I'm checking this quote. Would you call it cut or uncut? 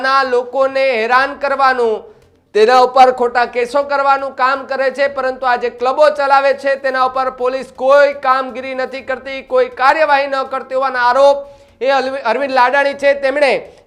uncut